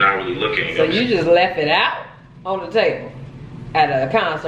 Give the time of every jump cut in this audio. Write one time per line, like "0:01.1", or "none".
none

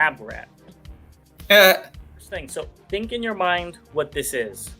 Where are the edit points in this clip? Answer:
0:02.4

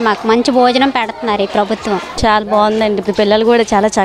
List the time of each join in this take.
0:02.1

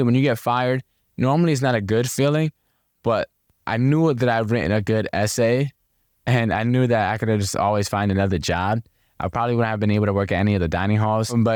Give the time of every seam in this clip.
none

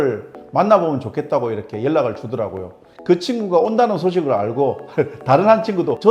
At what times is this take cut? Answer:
0:03.0

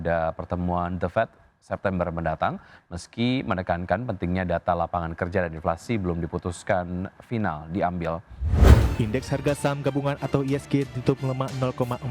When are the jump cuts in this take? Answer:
0:08.6

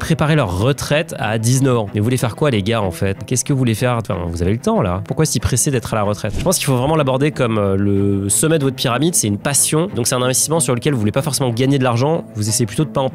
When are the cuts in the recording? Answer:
0:06.4

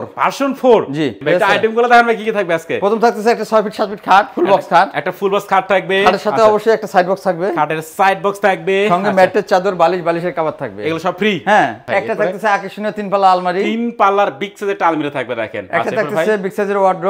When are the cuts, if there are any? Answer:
0:01.2
0:11.8

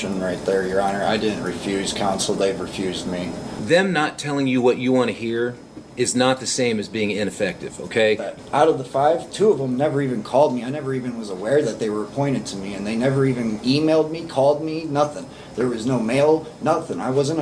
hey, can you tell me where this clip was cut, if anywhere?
0:03.5
0:08.4

